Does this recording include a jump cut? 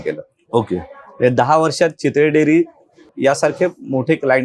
yes; 1 cut; at 3.1 s

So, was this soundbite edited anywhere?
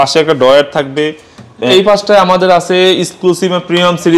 yes; 1 cut; at 1.7 s

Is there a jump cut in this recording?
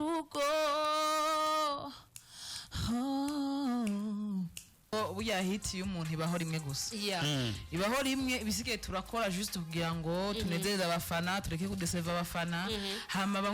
yes; 1 cut; at 4.9 s

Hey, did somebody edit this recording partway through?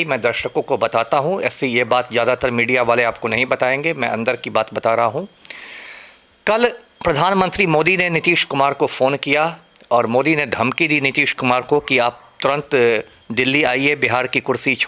no; 0 cuts

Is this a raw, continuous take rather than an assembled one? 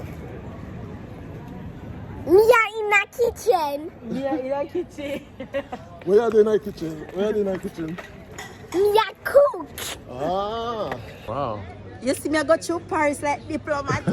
no; 1 cut; at 11.2 s

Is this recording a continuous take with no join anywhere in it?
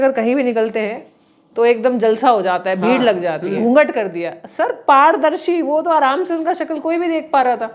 no; 1 cut; at 3.6 s

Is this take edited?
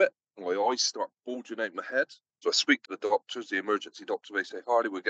yes; 1 cut; at 2.2 s

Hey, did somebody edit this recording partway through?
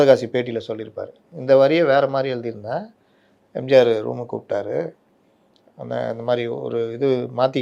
no; 0 cuts

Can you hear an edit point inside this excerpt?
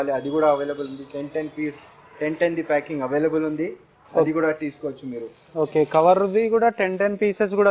no; 0 cuts

